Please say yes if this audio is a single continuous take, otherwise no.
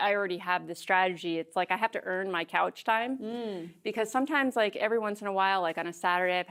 yes